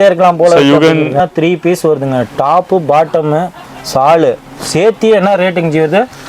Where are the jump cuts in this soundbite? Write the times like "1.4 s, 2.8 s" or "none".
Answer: 1.2 s